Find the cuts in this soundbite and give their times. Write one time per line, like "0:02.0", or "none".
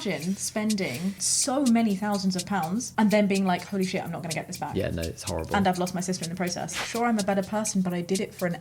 0:01.2
0:06.8